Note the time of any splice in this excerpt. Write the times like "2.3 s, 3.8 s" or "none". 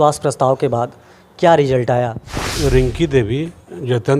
2.3 s